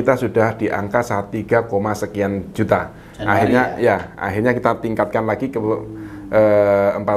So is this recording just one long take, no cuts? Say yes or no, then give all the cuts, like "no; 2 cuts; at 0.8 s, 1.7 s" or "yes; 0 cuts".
yes; 0 cuts